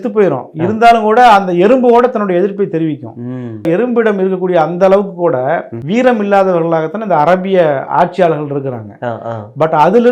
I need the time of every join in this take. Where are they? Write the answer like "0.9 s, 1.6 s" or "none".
3.7 s, 5.7 s